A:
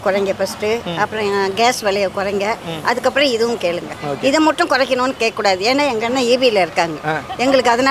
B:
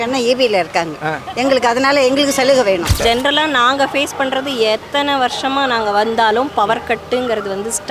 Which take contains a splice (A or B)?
B